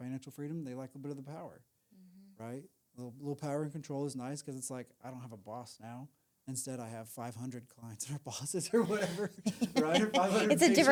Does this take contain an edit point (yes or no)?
no